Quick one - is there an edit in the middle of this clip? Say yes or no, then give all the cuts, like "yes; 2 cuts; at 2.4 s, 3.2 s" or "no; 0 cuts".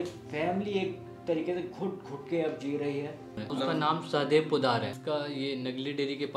yes; 2 cuts; at 3.4 s, 4.9 s